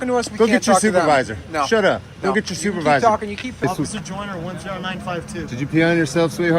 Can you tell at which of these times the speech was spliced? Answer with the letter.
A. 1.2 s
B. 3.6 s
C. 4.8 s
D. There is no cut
B